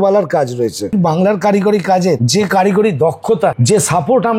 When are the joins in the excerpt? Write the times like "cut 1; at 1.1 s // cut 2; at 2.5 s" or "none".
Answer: cut 1; at 0.9 s // cut 2; at 2.2 s // cut 3; at 3.6 s